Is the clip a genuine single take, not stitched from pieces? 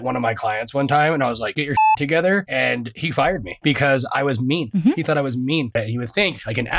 no; 4 cuts; at 1.5 s, 2.9 s, 4.7 s, 5.7 s

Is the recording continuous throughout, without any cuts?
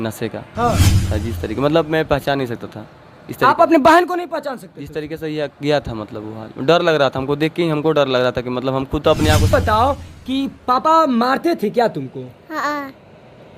no; 2 cuts; at 1.1 s, 9.5 s

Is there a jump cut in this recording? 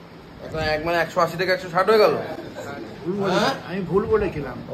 no; 0 cuts

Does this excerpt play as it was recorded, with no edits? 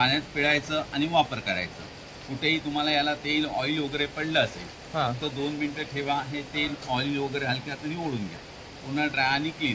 yes; 0 cuts

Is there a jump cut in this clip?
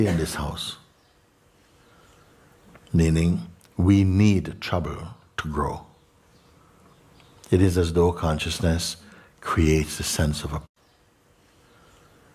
yes; 1 cut; at 10.6 s

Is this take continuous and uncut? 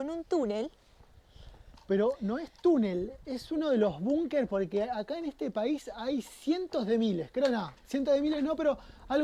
yes; 0 cuts

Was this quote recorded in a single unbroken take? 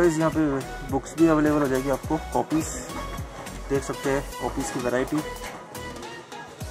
yes; 0 cuts

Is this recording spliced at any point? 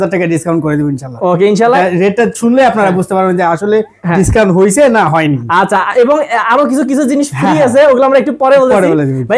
no; 0 cuts

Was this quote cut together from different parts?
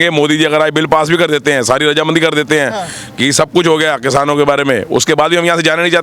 no; 0 cuts

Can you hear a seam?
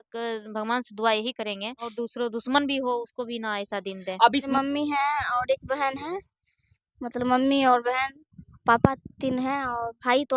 yes; 2 cuts; at 1.9 s, 4.5 s

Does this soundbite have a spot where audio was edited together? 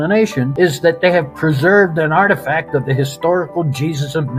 no; 0 cuts

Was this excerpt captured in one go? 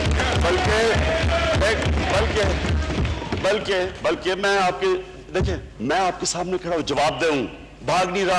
yes; 0 cuts

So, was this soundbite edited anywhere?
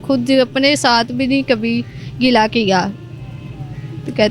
no; 0 cuts

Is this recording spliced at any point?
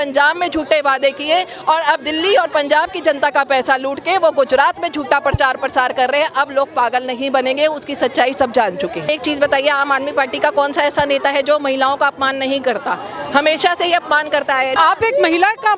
yes; 2 cuts; at 9.1 s, 14.8 s

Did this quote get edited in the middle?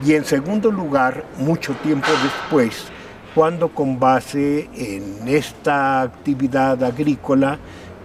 no; 0 cuts

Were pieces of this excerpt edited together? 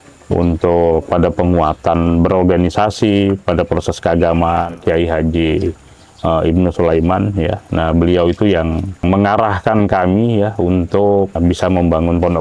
yes; 3 cuts; at 4.7 s, 9.0 s, 11.4 s

